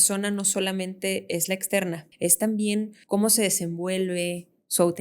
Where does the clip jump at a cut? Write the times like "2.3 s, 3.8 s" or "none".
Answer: 2.1 s, 3.0 s